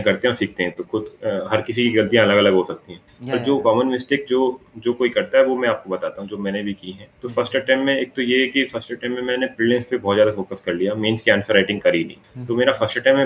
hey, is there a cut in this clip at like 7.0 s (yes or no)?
no